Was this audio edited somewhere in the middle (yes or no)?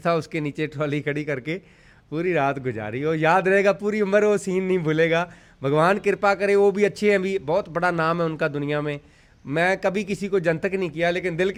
no